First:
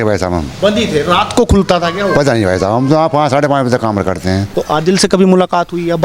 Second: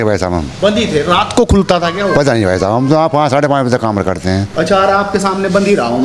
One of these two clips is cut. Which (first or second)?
first